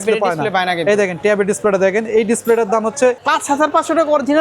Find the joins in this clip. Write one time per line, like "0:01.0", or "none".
0:03.2

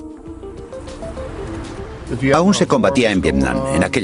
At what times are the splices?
0:01.2

